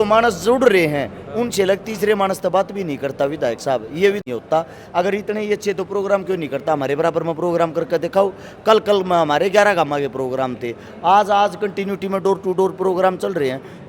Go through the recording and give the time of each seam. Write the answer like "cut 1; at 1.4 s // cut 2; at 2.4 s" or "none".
cut 1; at 4.2 s